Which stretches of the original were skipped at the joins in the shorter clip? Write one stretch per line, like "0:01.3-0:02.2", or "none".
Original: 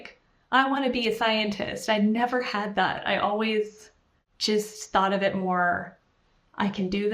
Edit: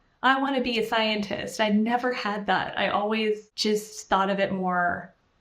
0:03.8-0:04.3